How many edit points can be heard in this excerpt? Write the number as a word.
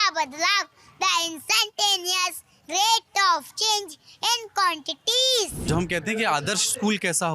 one